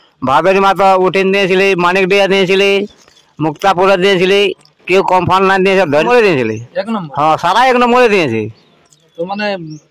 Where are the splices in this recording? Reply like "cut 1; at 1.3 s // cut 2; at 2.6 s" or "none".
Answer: cut 1; at 6.1 s